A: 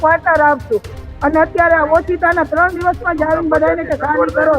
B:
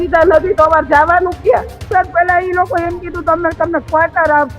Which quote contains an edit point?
B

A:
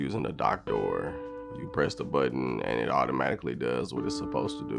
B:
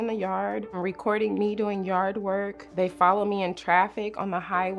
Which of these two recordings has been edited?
B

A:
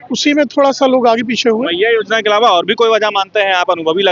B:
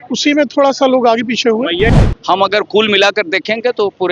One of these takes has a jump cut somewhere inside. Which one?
B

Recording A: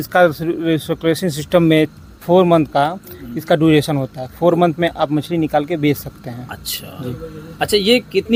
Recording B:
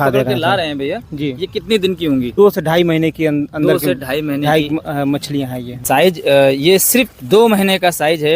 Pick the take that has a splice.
B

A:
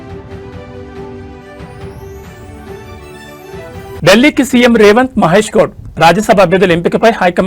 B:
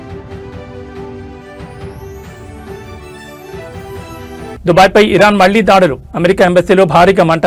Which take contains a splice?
A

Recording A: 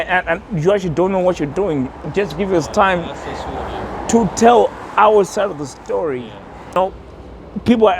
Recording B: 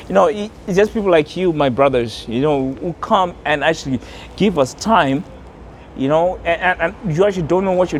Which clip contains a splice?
A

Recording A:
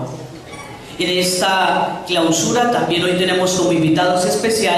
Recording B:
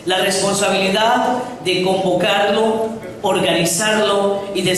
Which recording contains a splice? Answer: B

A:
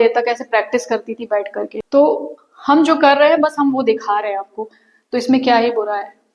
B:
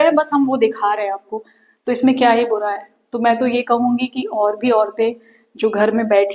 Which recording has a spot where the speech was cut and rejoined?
A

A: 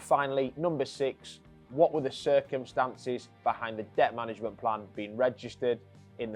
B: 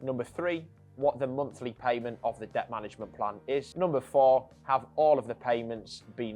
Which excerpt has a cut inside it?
B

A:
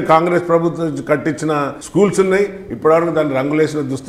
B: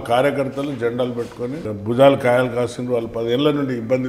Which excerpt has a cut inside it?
A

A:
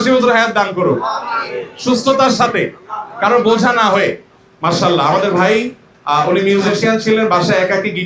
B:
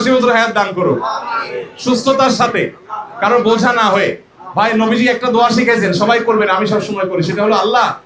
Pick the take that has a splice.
A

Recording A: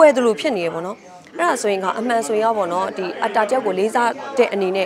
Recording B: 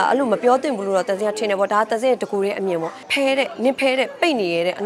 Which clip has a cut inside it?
B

